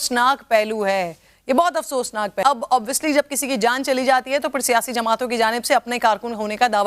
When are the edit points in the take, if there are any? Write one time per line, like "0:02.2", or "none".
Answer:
0:02.4